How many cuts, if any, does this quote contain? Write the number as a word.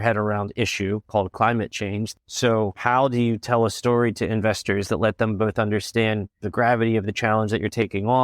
one